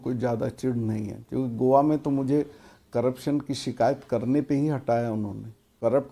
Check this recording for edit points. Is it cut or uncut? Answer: uncut